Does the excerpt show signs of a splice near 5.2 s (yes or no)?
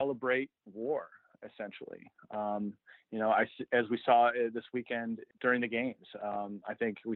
yes